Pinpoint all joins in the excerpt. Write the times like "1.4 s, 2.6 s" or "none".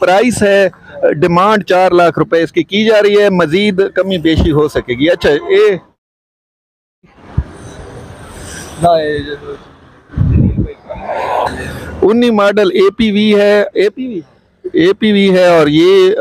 none